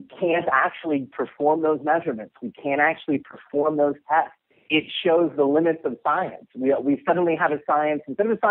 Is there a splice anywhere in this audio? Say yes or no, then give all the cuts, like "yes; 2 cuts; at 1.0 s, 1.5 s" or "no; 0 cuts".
no; 0 cuts